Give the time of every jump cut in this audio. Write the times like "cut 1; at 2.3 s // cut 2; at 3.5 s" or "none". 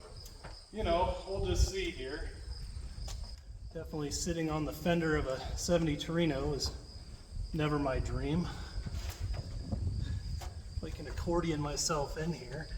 cut 1; at 3.4 s